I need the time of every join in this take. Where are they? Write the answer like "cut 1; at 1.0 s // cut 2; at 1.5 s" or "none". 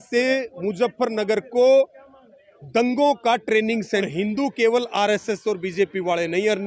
cut 1; at 4.1 s

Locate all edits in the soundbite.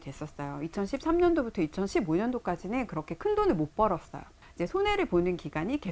cut 1; at 4.4 s

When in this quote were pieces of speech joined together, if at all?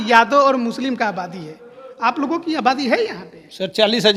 none

